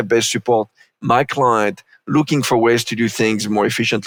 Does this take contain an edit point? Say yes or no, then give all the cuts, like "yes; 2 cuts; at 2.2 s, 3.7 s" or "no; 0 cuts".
no; 0 cuts